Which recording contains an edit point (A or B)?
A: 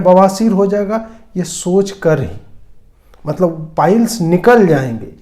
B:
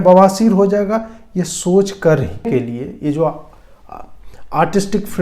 B